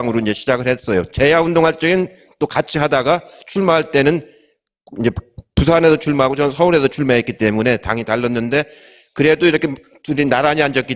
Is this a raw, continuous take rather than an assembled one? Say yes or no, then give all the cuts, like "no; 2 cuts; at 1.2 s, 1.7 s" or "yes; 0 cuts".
yes; 0 cuts